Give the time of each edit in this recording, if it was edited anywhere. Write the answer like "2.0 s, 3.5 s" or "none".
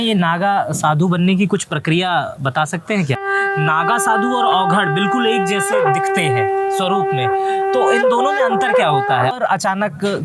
3.2 s, 9.3 s